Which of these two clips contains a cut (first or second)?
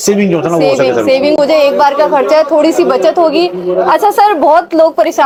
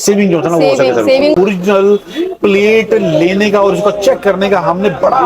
second